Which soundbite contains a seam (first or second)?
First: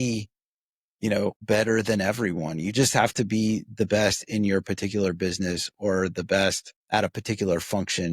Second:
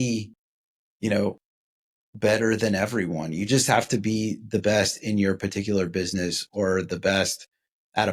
first